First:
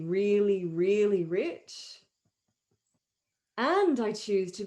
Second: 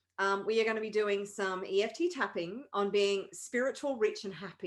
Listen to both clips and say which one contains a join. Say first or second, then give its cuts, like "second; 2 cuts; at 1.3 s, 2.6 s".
first; 1 cut; at 3.1 s